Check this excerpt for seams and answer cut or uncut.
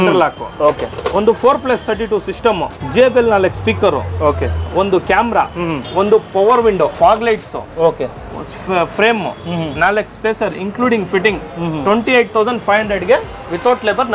cut